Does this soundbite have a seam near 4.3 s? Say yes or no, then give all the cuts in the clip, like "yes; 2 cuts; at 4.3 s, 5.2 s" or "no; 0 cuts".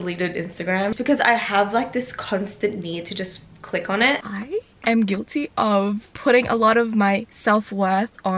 yes; 3 cuts; at 0.9 s, 4.3 s, 6.1 s